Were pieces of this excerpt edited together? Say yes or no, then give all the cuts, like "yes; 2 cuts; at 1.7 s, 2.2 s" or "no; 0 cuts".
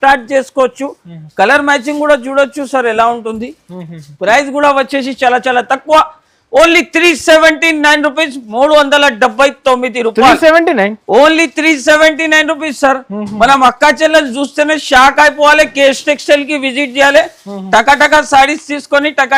no; 0 cuts